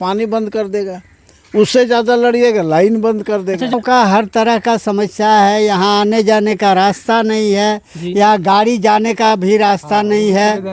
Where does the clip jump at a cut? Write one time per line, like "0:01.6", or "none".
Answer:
0:03.7